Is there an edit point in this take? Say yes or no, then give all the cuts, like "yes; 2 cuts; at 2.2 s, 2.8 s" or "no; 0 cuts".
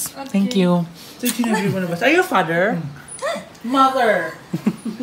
no; 0 cuts